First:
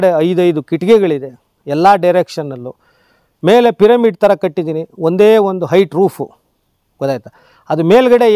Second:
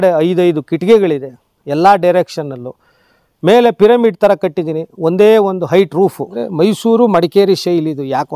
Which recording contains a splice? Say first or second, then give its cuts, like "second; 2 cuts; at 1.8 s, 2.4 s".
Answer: second; 1 cut; at 6.4 s